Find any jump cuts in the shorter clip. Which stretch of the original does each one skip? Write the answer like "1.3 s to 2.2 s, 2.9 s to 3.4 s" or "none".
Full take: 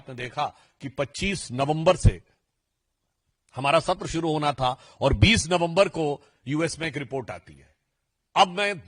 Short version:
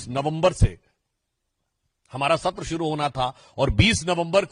none